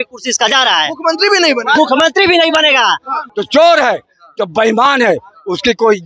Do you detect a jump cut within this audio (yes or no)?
yes